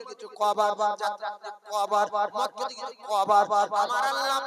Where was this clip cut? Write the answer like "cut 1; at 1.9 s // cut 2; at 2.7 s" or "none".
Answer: none